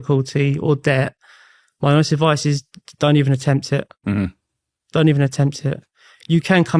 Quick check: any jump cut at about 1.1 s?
no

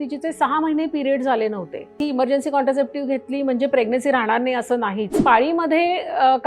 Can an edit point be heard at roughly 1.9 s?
yes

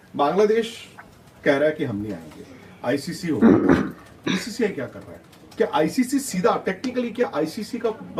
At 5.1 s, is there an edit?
no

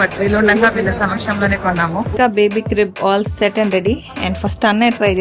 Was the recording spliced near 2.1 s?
yes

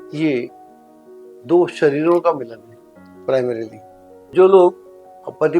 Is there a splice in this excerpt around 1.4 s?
no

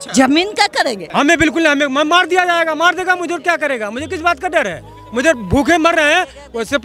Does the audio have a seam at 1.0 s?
yes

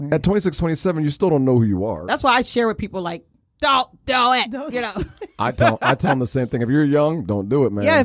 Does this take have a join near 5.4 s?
no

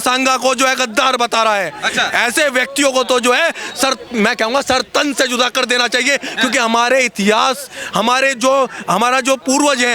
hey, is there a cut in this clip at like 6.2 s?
no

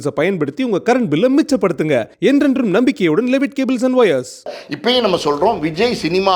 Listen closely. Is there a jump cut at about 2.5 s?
no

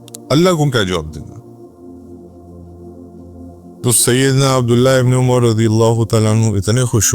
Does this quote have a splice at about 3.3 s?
yes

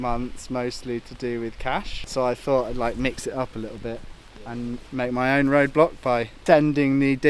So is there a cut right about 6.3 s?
yes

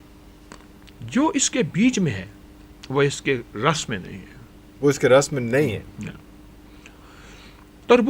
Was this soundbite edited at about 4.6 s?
no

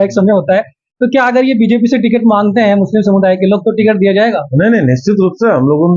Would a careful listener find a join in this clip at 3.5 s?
no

